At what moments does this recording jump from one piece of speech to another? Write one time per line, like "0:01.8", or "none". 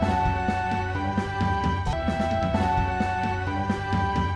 0:01.0